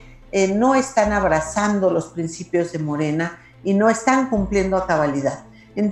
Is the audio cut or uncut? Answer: uncut